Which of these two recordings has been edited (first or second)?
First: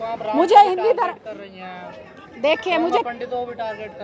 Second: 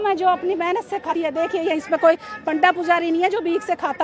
second